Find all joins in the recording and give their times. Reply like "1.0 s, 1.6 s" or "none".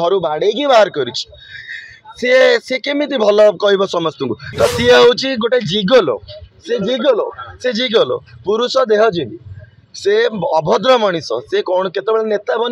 4.4 s

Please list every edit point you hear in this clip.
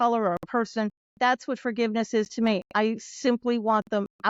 1.0 s

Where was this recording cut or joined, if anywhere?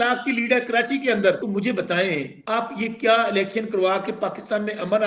1.4 s, 2.3 s

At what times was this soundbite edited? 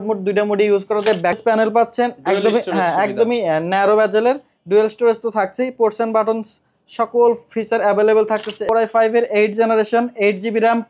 1.5 s, 8.7 s

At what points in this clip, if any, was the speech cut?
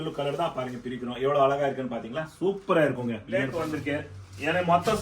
3.5 s

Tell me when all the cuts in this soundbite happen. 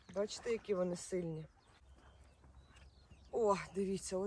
1.7 s

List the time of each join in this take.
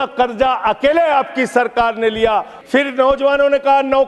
2.6 s

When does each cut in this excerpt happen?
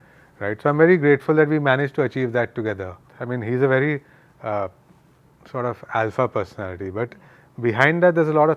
3.1 s

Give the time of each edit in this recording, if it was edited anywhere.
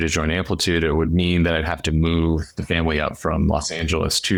none

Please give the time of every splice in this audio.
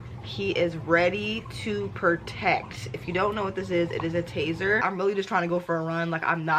4.8 s

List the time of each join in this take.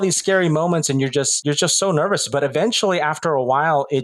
1.3 s

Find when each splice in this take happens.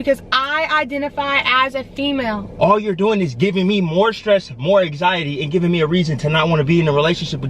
2.5 s

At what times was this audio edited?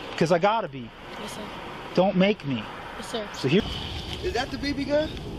3.6 s

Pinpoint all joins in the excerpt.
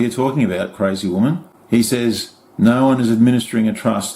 1.5 s

